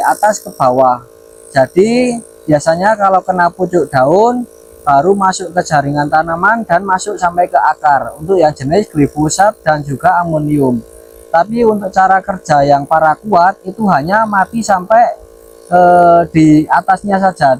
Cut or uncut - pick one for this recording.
uncut